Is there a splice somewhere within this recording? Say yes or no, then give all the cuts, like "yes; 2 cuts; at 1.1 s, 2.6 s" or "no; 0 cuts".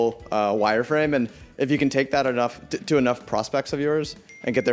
no; 0 cuts